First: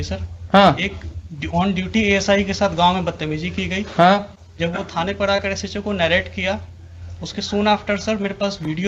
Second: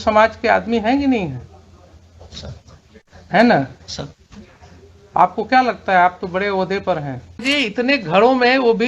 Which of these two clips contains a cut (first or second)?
second